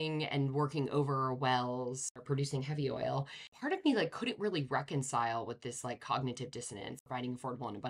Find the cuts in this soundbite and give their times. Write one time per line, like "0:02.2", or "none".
0:03.5
0:07.0